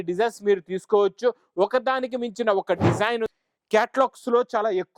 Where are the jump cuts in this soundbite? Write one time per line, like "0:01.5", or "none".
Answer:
0:03.3